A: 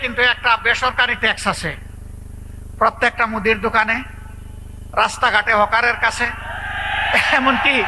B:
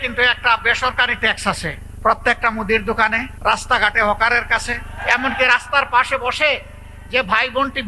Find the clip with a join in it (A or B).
B